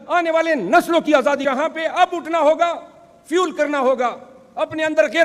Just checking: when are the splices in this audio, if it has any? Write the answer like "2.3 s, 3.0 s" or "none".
1.4 s